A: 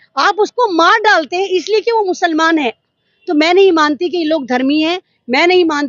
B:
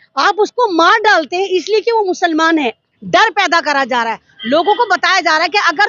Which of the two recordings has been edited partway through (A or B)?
B